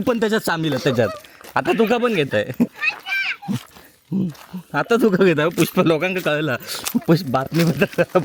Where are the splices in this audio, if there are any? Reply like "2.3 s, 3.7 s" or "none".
none